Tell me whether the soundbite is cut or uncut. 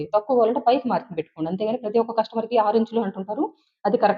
uncut